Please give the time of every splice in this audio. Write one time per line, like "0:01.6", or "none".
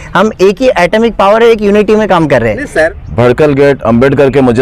0:03.0